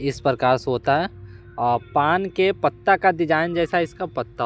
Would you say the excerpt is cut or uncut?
uncut